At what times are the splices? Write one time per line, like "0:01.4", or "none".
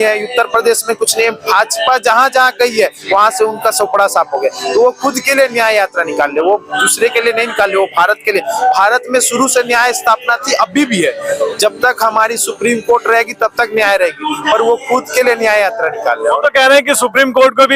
none